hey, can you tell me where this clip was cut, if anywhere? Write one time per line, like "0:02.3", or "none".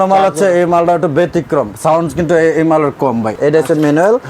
0:03.3

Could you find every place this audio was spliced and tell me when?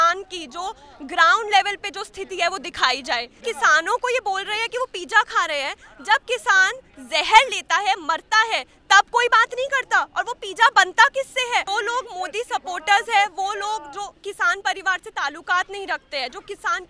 0:03.4
0:11.7

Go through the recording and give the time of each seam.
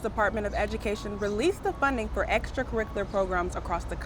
none

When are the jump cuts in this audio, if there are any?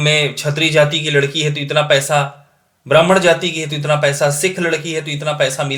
none

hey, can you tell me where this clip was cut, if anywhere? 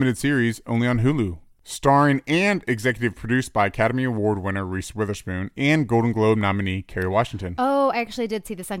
0:01.4

